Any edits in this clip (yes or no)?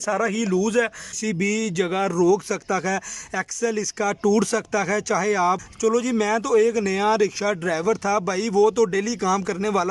yes